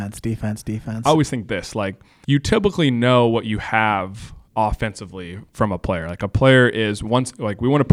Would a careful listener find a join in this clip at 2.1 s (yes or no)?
yes